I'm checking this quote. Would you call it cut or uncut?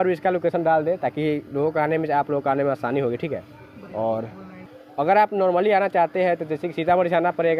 uncut